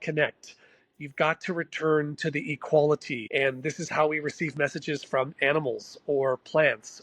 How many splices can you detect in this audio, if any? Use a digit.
1